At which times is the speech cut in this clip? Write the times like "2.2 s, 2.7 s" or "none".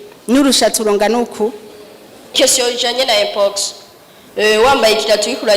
2.3 s